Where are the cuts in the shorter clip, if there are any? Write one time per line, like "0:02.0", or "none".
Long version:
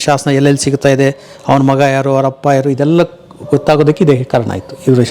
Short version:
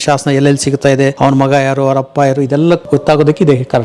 0:01.1
0:02.8